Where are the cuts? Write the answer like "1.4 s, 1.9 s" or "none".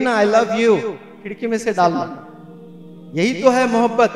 none